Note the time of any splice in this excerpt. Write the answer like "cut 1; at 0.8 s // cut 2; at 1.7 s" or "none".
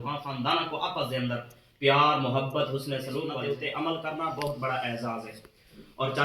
cut 1; at 3.3 s